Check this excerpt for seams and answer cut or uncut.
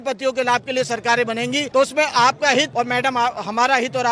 cut